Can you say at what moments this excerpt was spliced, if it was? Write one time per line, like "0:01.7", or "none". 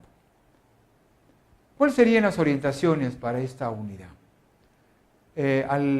0:02.8

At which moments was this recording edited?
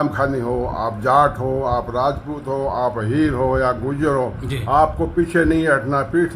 none

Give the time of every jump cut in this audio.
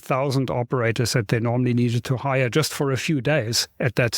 none

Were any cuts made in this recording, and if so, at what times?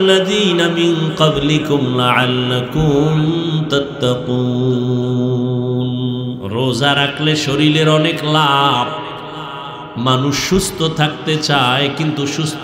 0:06.4

